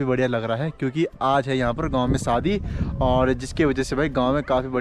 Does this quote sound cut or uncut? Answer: uncut